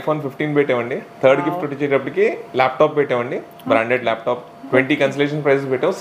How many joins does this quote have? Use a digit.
1